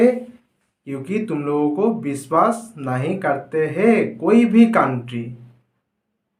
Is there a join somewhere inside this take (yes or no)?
no